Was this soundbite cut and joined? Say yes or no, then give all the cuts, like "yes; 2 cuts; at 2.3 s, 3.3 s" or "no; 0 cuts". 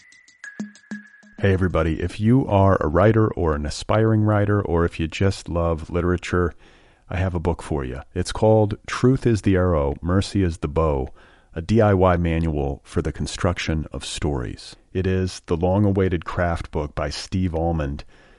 yes; 1 cut; at 0.9 s